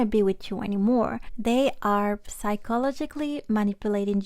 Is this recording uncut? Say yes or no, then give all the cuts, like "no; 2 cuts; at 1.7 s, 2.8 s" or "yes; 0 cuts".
no; 1 cut; at 1.3 s